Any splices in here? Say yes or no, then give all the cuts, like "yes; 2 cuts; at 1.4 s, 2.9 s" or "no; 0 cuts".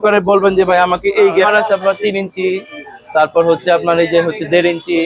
yes; 1 cut; at 1.5 s